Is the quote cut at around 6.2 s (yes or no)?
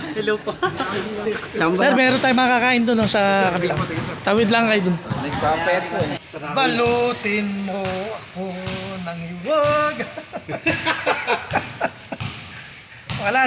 yes